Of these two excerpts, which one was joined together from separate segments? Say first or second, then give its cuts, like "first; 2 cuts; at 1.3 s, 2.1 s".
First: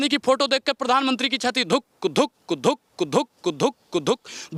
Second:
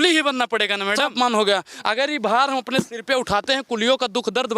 second; 1 cut; at 1.1 s